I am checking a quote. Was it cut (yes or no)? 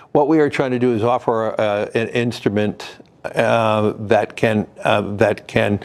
no